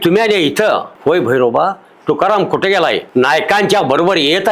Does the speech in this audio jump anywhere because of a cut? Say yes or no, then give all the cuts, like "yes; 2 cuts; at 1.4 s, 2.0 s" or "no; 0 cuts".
yes; 2 cuts; at 0.9 s, 3.0 s